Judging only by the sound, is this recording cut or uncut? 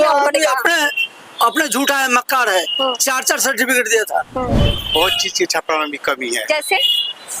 cut